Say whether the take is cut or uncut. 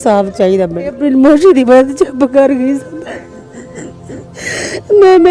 cut